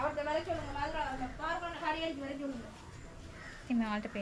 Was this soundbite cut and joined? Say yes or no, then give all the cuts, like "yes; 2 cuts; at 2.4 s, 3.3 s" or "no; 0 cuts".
no; 0 cuts